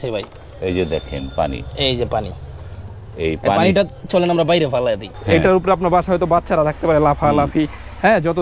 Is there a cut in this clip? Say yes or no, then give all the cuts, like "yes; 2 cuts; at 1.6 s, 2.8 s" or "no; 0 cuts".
yes; 1 cut; at 5.1 s